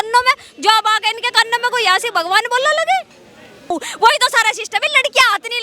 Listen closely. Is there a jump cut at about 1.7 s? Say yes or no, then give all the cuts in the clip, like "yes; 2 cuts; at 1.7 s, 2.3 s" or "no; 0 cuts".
no; 1 cut; at 3.7 s